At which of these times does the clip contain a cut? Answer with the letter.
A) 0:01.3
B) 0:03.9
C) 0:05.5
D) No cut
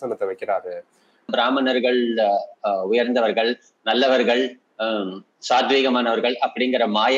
A